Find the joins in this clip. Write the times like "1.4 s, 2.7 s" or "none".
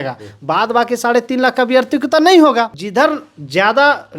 2.8 s